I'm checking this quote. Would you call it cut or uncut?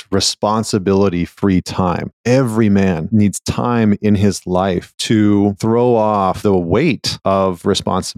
cut